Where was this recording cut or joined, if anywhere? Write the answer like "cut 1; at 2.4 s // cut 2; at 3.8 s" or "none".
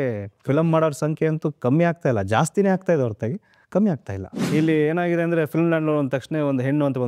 cut 1; at 4.4 s